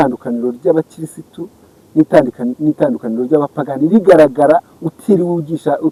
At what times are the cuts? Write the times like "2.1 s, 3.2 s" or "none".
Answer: none